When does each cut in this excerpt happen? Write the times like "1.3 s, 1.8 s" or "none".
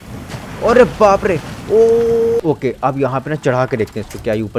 2.4 s